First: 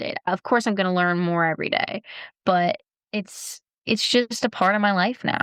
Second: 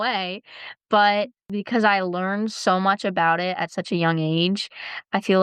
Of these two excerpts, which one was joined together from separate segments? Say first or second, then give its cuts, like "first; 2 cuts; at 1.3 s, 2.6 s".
second; 1 cut; at 1.4 s